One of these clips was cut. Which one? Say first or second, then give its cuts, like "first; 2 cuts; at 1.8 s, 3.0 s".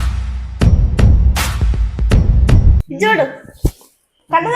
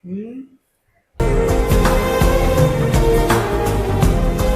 first; 1 cut; at 2.8 s